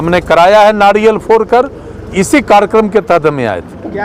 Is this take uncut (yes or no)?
yes